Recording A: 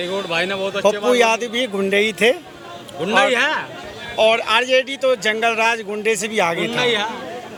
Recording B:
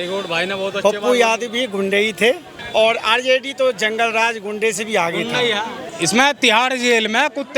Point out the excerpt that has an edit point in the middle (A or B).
B